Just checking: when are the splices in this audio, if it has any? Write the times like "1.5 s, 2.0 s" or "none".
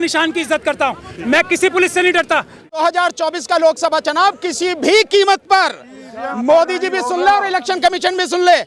2.8 s

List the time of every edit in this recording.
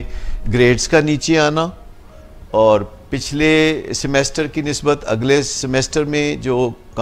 none

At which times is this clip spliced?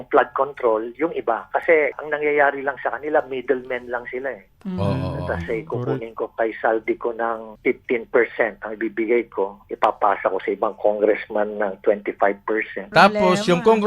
2.0 s, 7.5 s, 12.8 s

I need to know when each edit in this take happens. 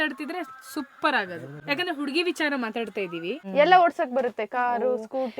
1.5 s, 3.4 s

